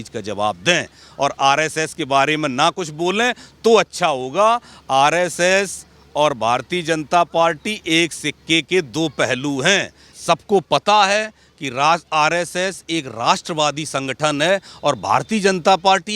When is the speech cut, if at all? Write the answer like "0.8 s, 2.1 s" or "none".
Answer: 10.1 s